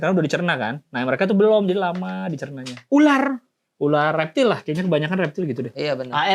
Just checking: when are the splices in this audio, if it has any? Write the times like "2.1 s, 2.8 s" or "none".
none